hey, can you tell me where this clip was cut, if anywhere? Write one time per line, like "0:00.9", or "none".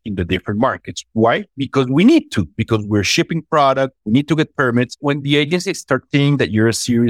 0:04.0
0:05.0